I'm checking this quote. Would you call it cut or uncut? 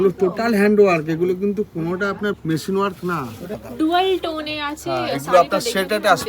cut